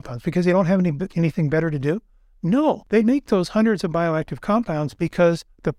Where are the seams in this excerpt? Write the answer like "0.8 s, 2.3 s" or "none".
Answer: 2.8 s